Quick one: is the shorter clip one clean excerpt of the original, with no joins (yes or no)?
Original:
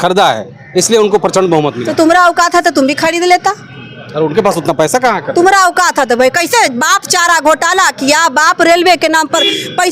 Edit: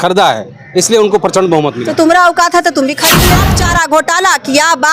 no